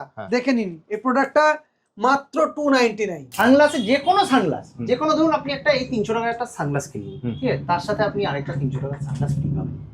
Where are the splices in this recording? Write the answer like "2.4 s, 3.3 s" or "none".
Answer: 3.2 s